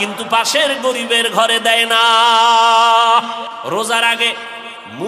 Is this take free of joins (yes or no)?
no